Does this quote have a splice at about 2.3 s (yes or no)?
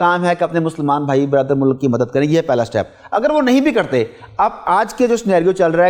no